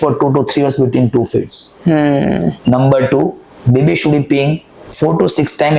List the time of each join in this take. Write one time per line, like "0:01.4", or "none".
none